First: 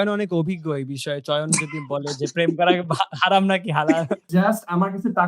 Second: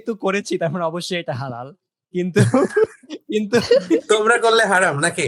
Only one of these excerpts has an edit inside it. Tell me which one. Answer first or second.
first